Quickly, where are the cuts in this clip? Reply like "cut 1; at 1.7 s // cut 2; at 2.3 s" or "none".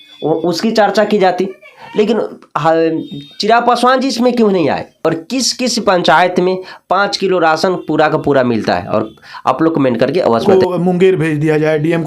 cut 1; at 4.9 s // cut 2; at 10.4 s